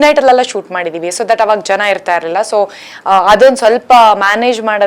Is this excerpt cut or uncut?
uncut